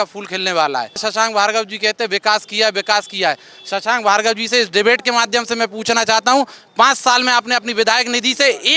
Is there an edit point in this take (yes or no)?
yes